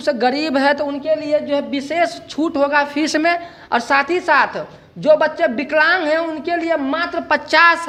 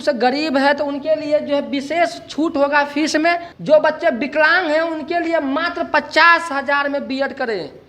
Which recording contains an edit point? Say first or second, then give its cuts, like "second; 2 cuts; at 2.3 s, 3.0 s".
second; 1 cut; at 3.5 s